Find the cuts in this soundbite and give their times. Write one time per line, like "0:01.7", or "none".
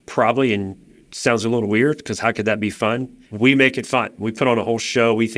0:03.2